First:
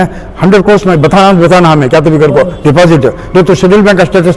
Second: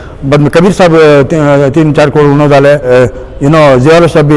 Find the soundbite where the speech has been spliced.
second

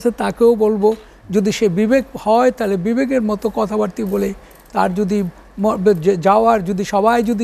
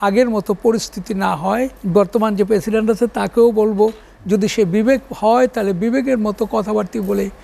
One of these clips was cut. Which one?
second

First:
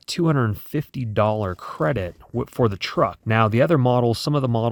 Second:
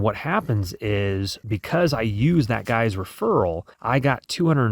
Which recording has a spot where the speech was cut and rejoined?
second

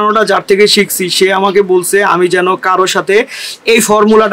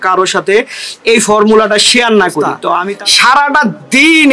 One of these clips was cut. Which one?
second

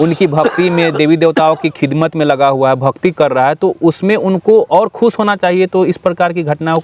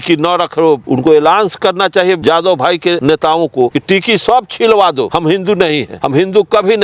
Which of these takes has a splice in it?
second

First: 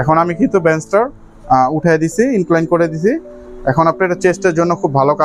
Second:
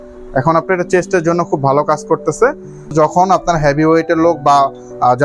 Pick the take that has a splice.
second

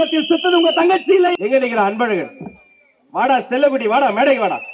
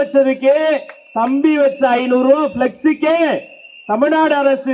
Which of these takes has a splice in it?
first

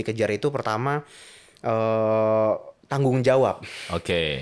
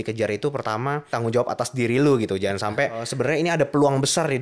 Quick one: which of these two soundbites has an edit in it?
second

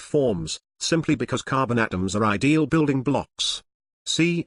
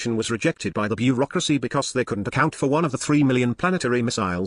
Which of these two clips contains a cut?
second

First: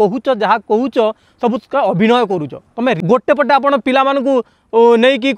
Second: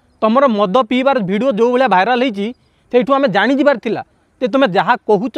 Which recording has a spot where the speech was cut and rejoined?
first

